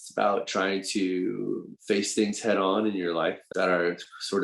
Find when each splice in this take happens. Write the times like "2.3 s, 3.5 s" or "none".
1.7 s, 3.4 s